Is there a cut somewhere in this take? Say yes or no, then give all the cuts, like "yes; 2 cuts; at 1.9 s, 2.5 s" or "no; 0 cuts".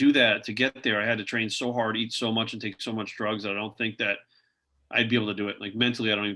no; 0 cuts